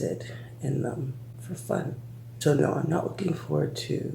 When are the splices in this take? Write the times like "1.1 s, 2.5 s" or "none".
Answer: none